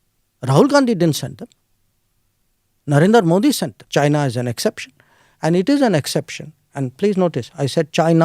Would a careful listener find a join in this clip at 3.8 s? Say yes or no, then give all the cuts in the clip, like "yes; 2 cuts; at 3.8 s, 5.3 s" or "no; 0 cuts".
yes; 1 cut; at 3.8 s